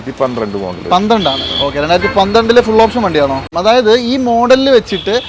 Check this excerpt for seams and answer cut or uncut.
cut